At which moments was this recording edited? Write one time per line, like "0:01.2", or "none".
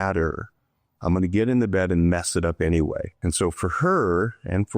0:03.1